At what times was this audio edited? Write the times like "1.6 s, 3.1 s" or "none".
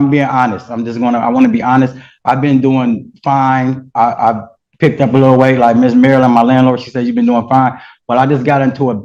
none